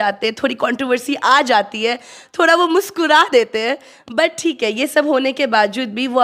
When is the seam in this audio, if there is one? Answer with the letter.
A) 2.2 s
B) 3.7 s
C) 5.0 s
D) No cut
D